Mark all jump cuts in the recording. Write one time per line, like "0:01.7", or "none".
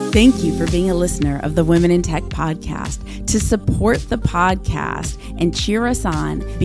none